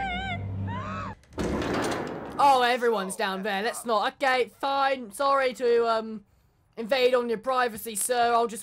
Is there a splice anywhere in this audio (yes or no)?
yes